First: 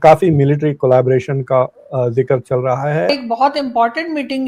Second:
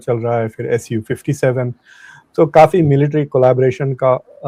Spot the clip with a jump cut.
first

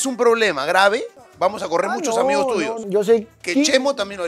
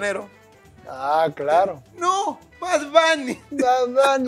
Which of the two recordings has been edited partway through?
first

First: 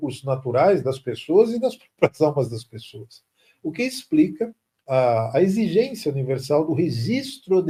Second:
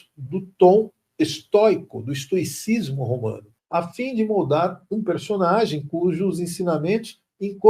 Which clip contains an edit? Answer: second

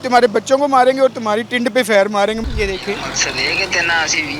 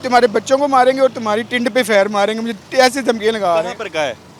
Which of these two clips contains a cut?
first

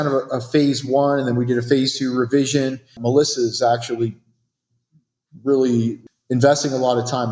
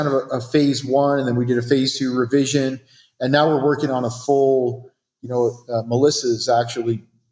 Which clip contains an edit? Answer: first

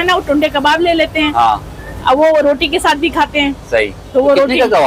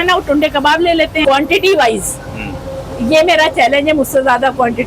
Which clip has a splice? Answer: second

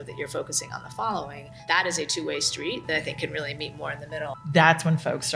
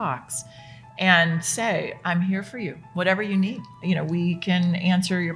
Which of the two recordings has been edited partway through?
first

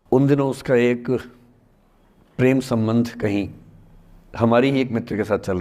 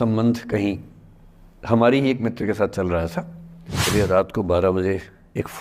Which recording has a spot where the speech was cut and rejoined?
second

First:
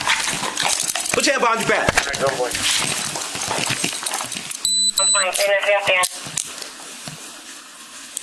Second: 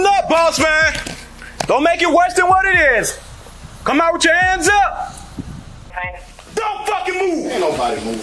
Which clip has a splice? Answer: second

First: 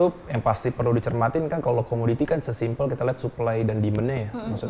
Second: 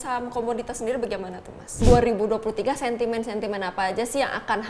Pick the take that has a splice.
second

